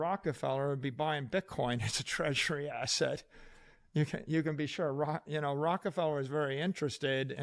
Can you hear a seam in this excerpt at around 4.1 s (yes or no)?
no